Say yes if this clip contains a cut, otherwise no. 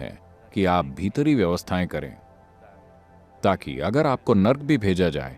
no